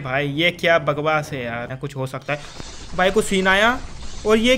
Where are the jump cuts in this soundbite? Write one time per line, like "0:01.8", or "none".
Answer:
0:01.7